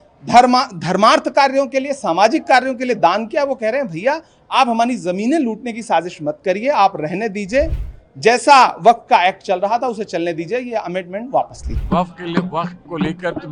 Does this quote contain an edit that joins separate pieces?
yes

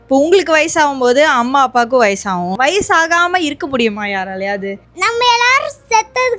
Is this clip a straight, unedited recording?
no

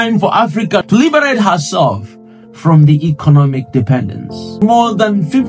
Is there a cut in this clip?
yes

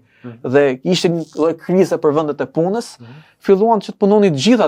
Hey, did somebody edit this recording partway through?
no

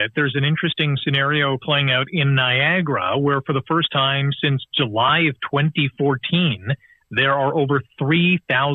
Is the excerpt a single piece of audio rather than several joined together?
yes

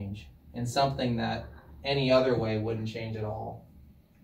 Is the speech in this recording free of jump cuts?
yes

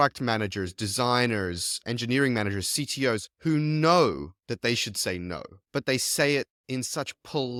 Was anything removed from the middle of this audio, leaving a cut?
no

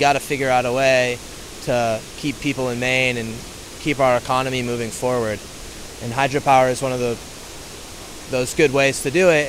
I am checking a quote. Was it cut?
no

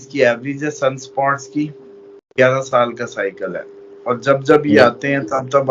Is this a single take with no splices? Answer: yes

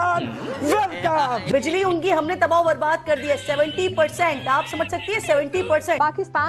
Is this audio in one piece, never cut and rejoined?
no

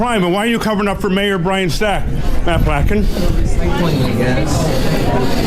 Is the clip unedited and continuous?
yes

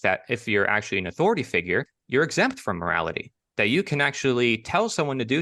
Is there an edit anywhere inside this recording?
yes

